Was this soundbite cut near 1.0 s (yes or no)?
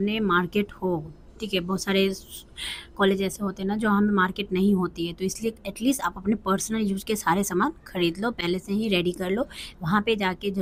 no